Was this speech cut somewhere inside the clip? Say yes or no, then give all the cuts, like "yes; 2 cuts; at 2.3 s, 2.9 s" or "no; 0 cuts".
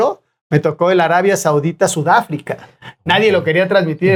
no; 0 cuts